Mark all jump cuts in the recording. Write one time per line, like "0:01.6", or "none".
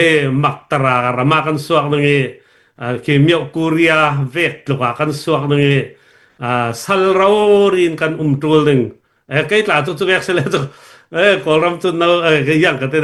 none